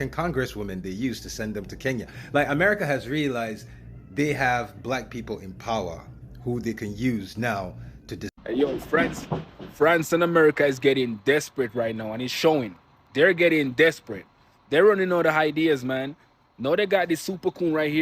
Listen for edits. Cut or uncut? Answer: cut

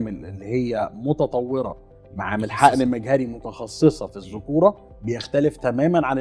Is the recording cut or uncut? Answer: uncut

